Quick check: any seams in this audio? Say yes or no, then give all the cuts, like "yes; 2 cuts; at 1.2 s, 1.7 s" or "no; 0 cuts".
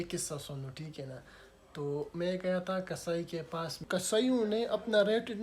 yes; 1 cut; at 3.8 s